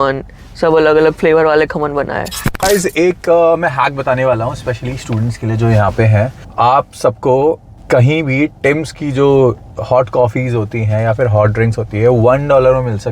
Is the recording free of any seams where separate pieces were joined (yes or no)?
no